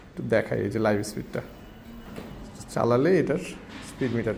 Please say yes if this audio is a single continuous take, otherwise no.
yes